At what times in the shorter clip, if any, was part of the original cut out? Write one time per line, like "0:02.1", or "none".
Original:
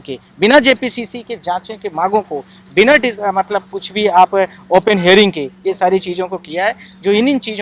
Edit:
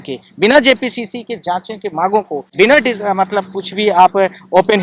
0:02.4

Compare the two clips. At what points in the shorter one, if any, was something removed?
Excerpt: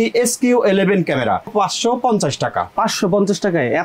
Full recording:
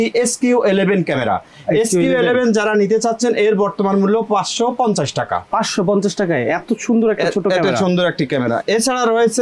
0:01.5

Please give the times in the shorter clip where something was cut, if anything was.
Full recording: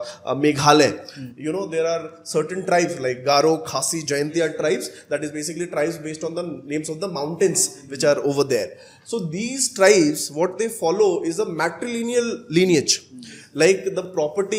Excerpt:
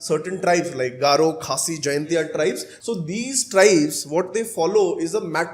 0:02.7

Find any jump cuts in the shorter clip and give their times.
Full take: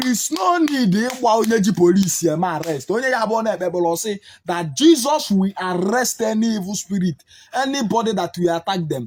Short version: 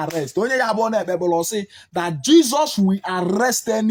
none

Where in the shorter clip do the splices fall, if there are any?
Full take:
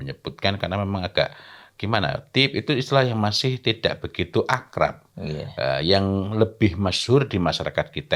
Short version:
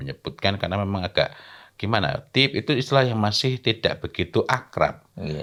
none

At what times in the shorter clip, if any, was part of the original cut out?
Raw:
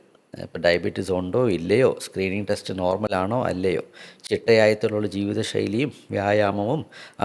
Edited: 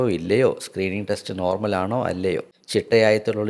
0:02.6

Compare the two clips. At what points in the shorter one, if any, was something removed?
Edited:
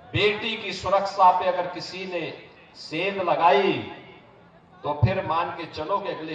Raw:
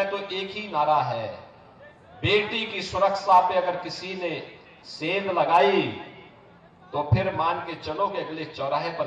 none

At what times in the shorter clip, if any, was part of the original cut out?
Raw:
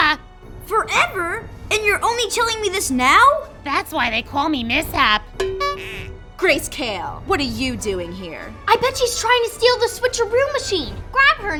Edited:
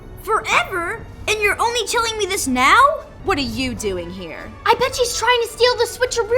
0:03.1

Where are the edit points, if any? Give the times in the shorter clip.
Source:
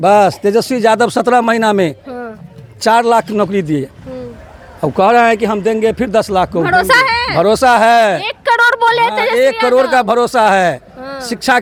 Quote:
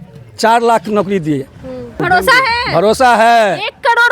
0:02.0

